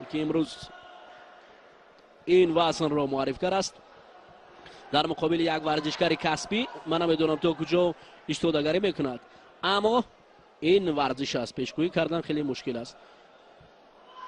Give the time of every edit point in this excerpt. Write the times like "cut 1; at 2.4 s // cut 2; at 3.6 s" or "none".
cut 1; at 5.8 s